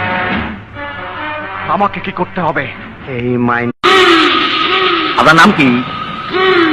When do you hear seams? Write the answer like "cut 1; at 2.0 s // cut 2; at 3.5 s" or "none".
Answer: cut 1; at 3.8 s